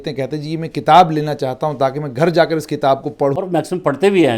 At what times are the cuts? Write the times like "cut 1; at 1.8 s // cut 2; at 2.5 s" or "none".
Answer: cut 1; at 3.4 s

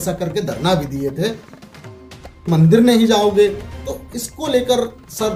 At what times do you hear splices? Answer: cut 1; at 2.5 s

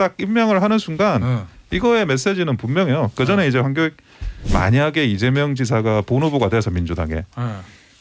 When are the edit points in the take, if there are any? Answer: cut 1; at 4.5 s

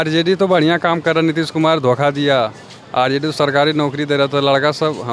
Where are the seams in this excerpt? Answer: none

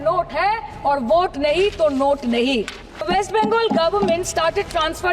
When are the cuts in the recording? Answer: cut 1; at 3.0 s

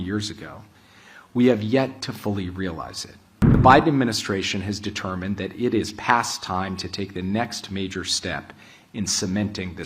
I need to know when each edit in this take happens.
cut 1; at 3.5 s

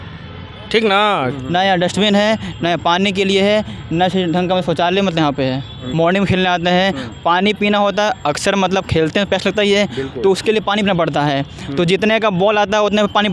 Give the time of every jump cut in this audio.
cut 1; at 1.4 s // cut 2; at 5.8 s

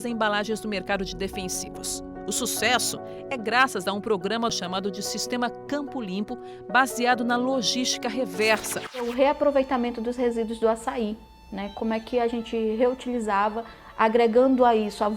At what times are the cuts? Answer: cut 1; at 9.0 s

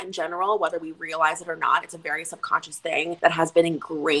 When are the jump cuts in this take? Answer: cut 1; at 3.2 s

